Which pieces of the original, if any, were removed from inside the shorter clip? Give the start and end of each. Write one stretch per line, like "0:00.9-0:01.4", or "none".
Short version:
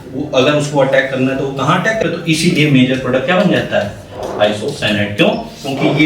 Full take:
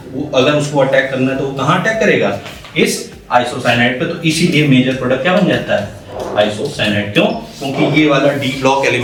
0:02.0-0:04.0